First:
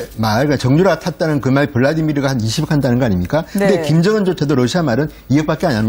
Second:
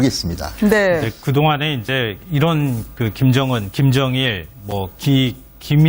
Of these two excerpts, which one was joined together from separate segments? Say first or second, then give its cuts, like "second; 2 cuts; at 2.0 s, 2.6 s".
second; 1 cut; at 2.8 s